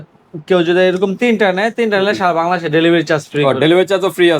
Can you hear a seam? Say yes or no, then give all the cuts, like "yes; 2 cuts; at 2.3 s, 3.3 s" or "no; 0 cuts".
no; 0 cuts